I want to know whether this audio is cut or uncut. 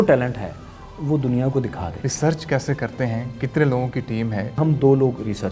cut